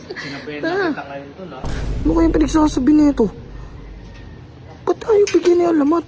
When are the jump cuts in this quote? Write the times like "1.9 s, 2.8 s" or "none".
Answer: 1.8 s